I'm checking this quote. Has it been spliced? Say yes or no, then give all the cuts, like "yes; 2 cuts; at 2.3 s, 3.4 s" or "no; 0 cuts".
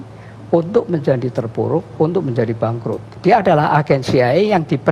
yes; 1 cut; at 3.0 s